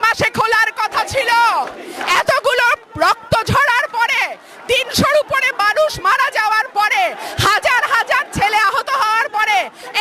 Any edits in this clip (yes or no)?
no